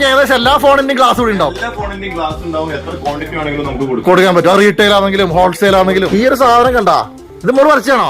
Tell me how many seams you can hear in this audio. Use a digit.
1